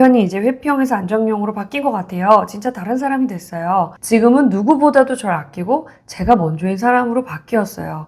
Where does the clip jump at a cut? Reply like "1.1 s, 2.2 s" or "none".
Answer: 4.0 s